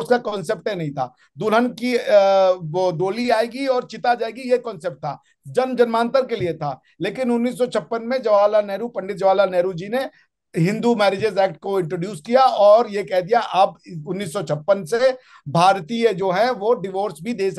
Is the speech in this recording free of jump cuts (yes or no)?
yes